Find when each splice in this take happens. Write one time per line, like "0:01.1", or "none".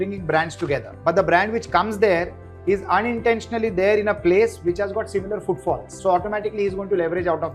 0:00.9
0:05.9